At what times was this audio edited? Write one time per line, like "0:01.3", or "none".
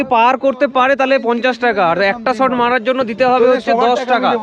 none